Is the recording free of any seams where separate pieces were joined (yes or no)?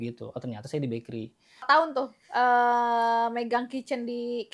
no